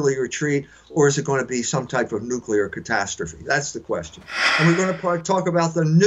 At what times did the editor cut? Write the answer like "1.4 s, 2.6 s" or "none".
4.4 s